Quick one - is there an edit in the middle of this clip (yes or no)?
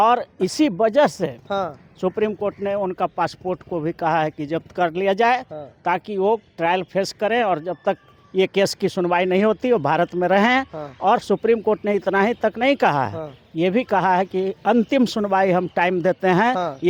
no